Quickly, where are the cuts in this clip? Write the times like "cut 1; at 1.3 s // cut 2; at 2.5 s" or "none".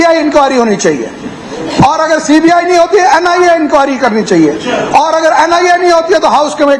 none